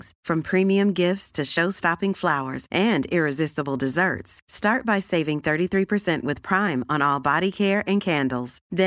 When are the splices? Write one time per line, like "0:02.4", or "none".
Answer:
none